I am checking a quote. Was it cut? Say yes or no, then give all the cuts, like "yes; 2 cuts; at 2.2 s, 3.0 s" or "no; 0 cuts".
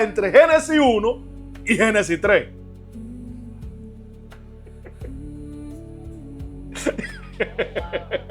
no; 0 cuts